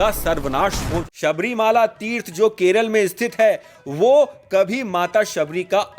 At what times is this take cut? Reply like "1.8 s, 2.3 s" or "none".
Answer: 1.0 s